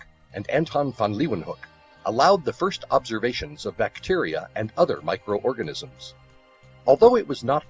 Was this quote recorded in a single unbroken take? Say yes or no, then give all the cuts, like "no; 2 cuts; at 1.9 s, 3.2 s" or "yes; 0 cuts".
no; 1 cut; at 3.5 s